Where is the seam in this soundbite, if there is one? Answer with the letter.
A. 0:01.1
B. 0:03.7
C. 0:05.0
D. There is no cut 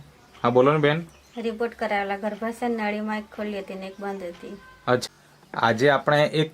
C